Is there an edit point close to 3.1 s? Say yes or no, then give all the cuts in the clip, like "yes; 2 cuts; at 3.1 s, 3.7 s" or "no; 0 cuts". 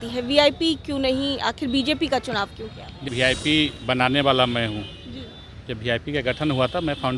yes; 1 cut; at 3.1 s